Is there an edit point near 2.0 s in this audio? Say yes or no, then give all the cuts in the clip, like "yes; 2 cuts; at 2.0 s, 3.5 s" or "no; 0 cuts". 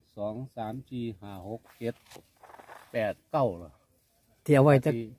no; 0 cuts